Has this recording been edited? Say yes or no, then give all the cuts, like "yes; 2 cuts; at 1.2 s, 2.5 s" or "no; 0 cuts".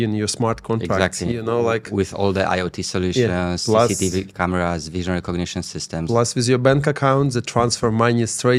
no; 0 cuts